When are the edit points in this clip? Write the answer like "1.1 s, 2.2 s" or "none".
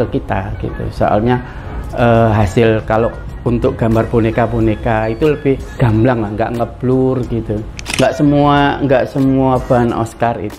5.8 s, 7.9 s